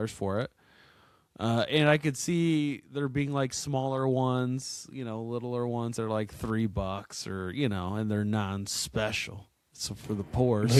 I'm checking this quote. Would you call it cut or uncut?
uncut